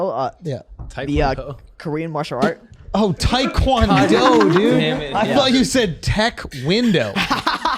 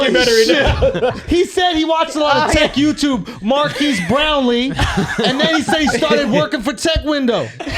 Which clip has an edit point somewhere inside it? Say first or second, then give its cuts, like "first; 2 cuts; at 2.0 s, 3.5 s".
second; 1 cut; at 1.2 s